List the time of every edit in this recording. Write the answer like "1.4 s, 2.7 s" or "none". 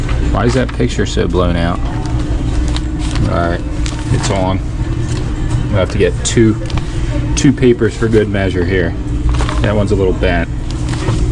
2.5 s